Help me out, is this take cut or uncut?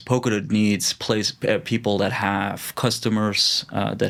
uncut